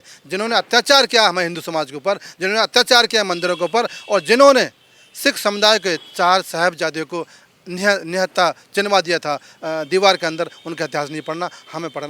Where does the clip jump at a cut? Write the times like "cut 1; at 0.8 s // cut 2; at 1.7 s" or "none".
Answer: none

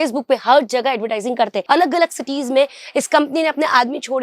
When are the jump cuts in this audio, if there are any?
cut 1; at 1.7 s

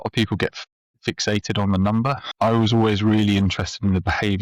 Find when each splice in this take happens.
cut 1; at 2.3 s

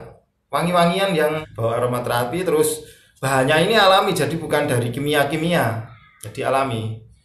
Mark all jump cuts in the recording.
cut 1; at 1.5 s

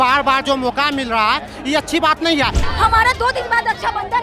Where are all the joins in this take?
cut 1; at 2.6 s

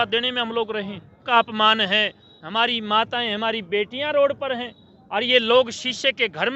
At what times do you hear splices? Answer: cut 1; at 1.3 s

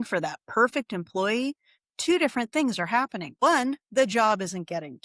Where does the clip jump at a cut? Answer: cut 1; at 3.3 s

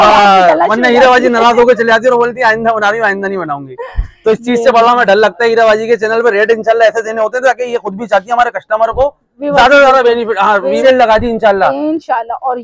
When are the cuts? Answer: cut 1; at 10.8 s

